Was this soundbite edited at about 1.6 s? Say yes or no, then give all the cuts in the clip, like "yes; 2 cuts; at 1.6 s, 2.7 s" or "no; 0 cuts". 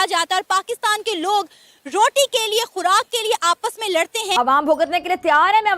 no; 1 cut; at 4.3 s